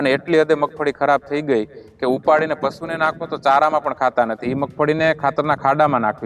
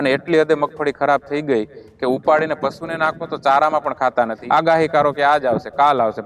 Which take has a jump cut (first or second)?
second